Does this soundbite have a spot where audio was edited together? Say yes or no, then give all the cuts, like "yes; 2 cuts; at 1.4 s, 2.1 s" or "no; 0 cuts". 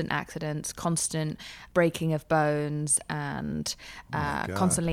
yes; 1 cut; at 1.5 s